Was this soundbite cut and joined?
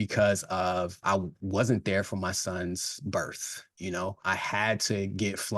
yes; 2 cuts; at 1.2 s, 4.1 s

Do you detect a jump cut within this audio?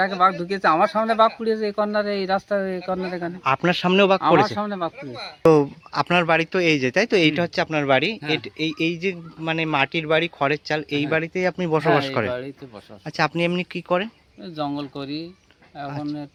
no; 0 cuts

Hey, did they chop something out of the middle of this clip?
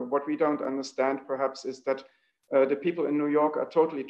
no; 0 cuts

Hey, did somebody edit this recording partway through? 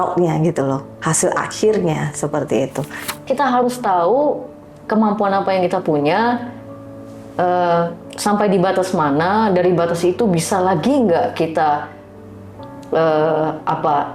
yes; 1 cut; at 2.9 s

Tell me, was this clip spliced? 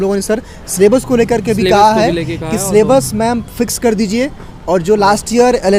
no; 0 cuts

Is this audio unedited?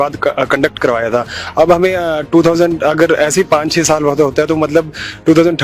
yes; 0 cuts

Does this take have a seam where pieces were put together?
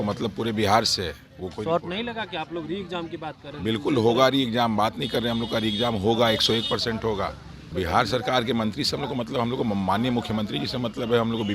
yes; 1 cut; at 7.7 s

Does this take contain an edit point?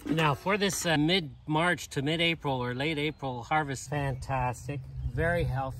yes; 2 cuts; at 1.0 s, 3.8 s

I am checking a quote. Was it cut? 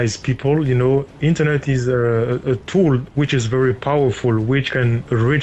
no; 0 cuts

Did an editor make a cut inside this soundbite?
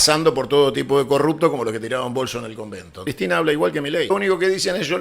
yes; 2 cuts; at 3.1 s, 4.1 s

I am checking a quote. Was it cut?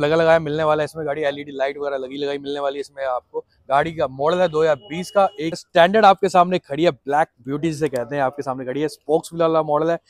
yes; 1 cut; at 5.6 s

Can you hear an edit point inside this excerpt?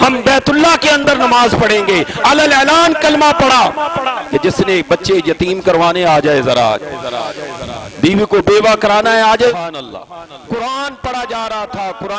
yes; 1 cut; at 9.5 s

